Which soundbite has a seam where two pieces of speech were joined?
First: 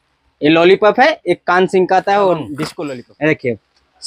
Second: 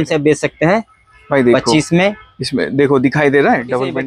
first; 1 cut; at 2.6 s

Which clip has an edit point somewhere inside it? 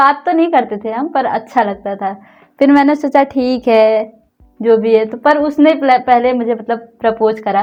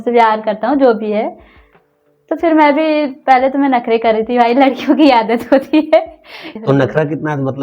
second; 1 cut; at 6.4 s

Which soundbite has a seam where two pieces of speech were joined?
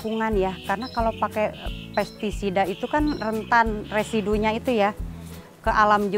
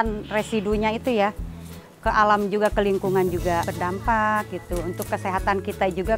second; 1 cut; at 3.7 s

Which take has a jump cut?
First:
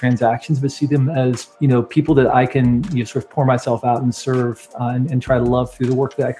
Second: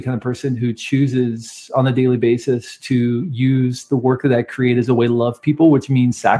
first; 1 cut; at 1.5 s

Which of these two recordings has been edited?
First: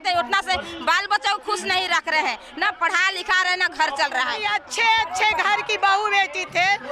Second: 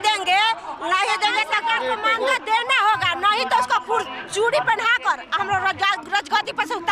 first; 1 cut; at 4.4 s

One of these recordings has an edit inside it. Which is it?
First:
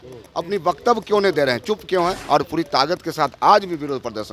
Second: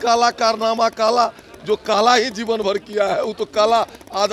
first; 1 cut; at 2.2 s

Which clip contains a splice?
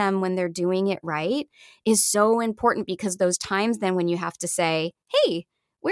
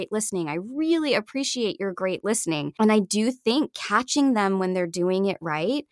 second; 1 cut; at 2.7 s

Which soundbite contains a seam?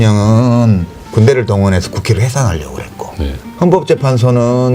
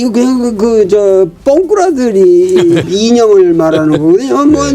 second; 1 cut; at 2.8 s

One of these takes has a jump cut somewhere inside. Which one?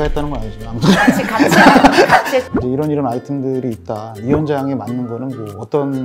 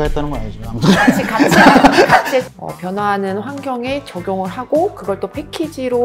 second; 1 cut; at 2.5 s

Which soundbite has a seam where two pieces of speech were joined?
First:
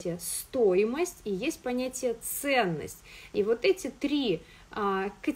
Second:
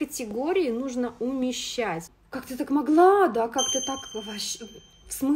second; 1 cut; at 2.1 s

